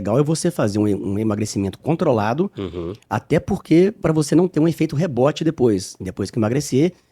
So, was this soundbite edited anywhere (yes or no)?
no